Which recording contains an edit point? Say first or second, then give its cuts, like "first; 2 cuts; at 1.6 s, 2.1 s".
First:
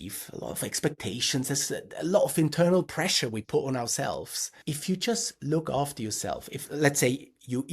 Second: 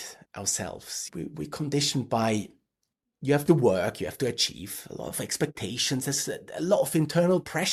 first; 1 cut; at 4.5 s